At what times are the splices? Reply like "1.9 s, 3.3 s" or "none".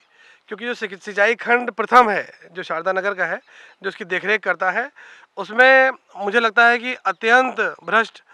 none